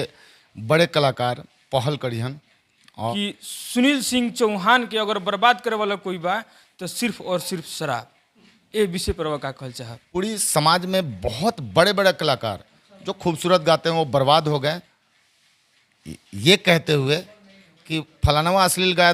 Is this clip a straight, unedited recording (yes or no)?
no